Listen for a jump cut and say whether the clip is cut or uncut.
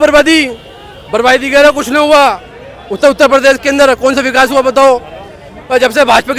uncut